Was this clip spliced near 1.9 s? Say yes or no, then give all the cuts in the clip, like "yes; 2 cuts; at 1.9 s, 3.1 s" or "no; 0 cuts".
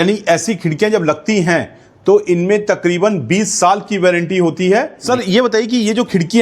no; 1 cut; at 5.0 s